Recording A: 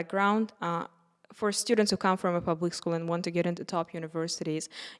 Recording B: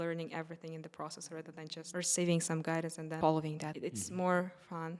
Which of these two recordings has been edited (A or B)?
B